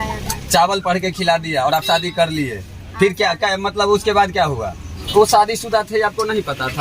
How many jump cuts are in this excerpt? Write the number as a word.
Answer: one